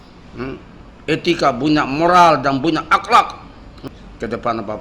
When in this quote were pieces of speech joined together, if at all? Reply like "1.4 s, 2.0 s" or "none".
3.9 s